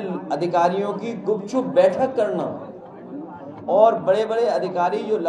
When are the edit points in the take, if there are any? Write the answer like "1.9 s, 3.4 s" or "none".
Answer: none